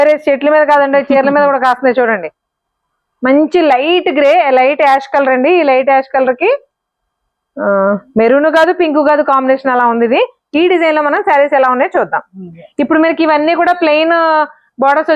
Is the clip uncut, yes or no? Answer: yes